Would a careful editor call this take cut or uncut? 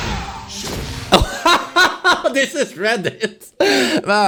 uncut